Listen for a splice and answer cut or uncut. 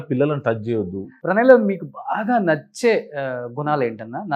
cut